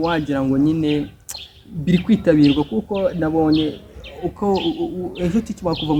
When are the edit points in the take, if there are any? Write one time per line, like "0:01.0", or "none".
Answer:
none